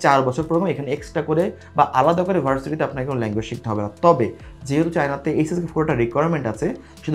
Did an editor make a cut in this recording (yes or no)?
no